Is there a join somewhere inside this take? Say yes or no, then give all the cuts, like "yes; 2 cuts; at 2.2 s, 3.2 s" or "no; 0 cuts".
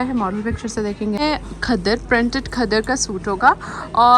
yes; 1 cut; at 1.2 s